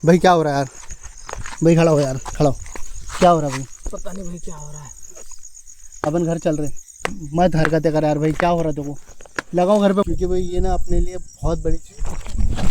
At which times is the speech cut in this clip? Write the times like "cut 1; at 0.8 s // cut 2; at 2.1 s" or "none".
cut 1; at 10.1 s